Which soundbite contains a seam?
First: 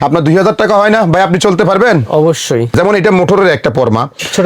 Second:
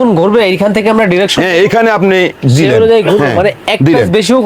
first; 1 cut; at 2.7 s

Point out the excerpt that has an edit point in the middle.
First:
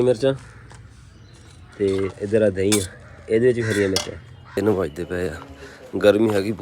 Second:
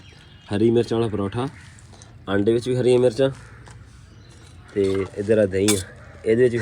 first; 1 cut; at 4.6 s

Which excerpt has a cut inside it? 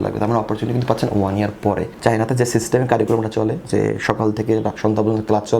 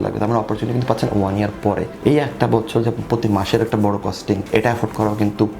first; 1 cut; at 1.9 s

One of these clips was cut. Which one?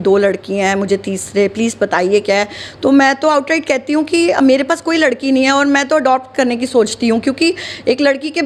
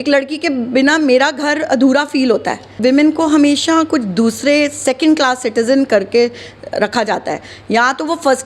second; 1 cut; at 2.7 s

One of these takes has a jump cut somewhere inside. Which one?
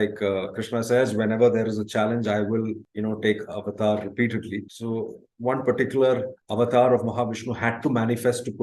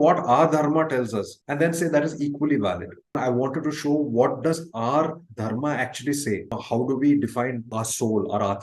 second; 3 cuts; at 3.1 s, 6.6 s, 7.7 s

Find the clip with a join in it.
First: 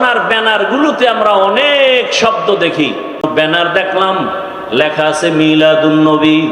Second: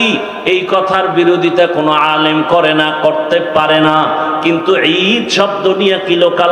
first; 1 cut; at 3.2 s

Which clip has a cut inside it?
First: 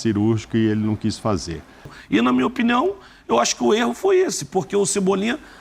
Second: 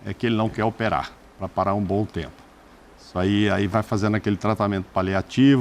first; 1 cut; at 1.9 s

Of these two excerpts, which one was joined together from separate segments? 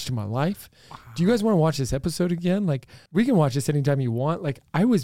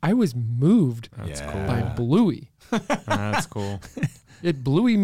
first; 1 cut; at 2.9 s

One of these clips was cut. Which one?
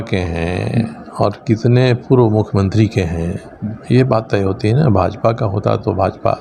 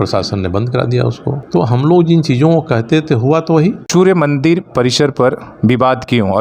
second; 2 cuts; at 1.4 s, 3.8 s

